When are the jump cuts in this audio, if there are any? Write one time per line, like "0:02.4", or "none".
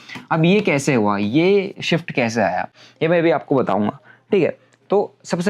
none